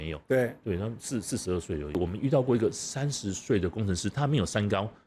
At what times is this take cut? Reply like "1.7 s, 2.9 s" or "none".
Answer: 2.0 s